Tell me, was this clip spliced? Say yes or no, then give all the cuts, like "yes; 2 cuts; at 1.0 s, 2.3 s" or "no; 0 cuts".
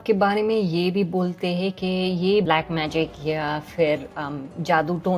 yes; 1 cut; at 2.4 s